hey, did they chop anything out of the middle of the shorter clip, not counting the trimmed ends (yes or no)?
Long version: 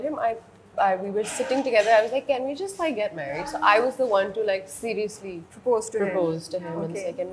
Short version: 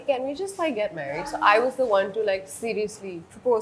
no